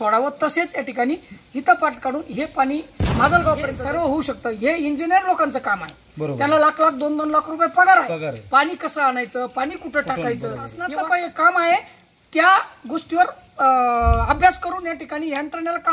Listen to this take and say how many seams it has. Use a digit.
2